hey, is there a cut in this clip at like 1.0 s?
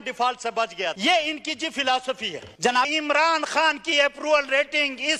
yes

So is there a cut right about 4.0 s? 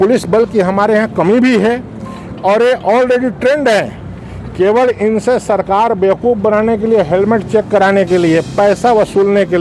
no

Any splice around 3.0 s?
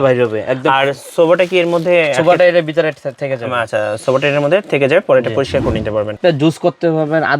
no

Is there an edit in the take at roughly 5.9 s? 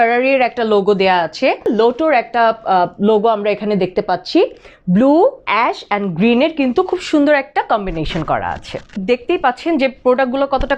no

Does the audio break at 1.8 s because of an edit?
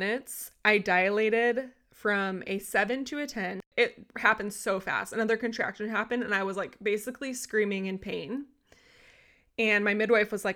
no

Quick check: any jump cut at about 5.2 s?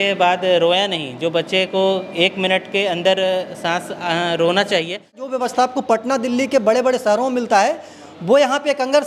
yes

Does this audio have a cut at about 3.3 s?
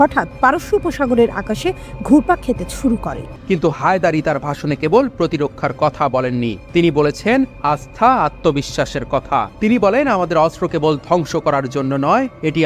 yes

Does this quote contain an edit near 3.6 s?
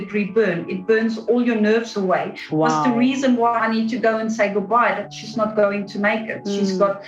yes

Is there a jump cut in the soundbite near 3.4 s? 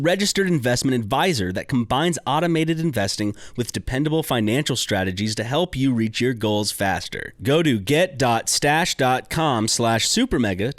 no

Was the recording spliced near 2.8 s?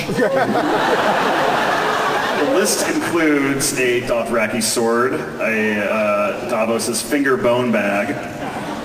no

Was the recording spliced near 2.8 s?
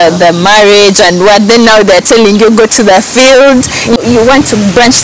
no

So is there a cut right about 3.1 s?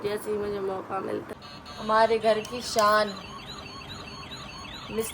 no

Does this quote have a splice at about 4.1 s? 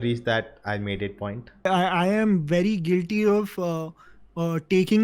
no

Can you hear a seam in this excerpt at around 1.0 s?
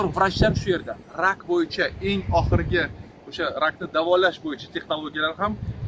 no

